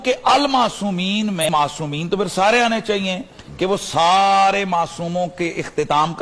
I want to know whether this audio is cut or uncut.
cut